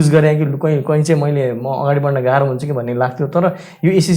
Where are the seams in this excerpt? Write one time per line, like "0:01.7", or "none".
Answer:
none

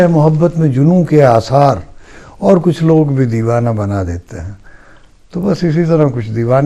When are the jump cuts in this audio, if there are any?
none

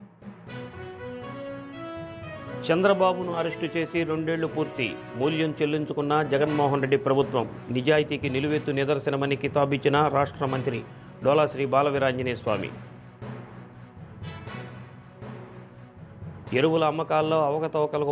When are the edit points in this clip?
0:01.3

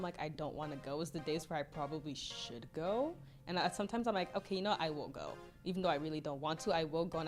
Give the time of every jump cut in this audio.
none

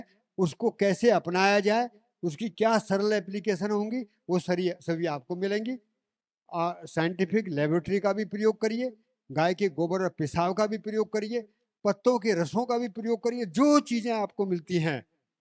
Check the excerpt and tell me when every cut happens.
none

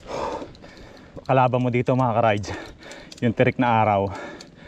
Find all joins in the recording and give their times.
0:01.2

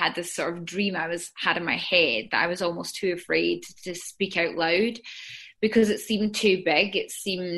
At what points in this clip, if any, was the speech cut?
none

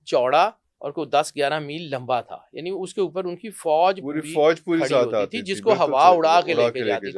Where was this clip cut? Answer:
none

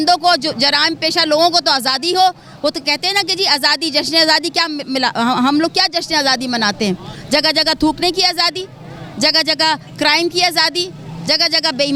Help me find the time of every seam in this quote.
none

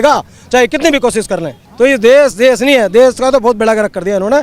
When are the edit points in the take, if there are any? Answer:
0:01.6

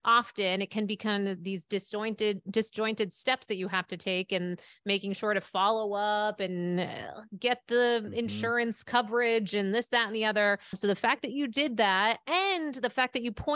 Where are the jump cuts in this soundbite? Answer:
0:10.8

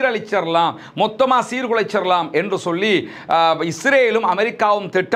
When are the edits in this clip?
none

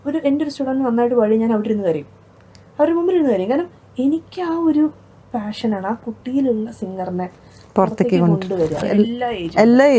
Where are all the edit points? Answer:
0:08.9

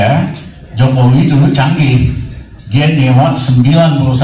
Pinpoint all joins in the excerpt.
none

